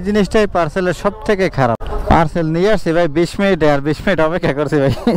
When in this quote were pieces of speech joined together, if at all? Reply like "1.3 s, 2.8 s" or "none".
1.9 s